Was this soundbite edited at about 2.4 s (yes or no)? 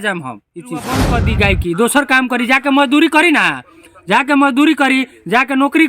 no